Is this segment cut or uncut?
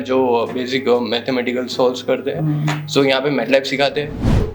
uncut